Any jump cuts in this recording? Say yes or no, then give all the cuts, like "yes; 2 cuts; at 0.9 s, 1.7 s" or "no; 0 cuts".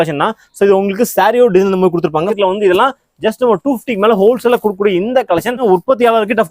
yes; 2 cuts; at 2.3 s, 5.6 s